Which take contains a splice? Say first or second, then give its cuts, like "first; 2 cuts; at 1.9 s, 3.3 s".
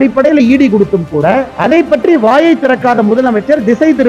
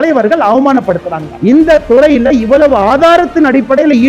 second; 1 cut; at 1.3 s